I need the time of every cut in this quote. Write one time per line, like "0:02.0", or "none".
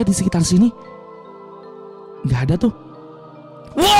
none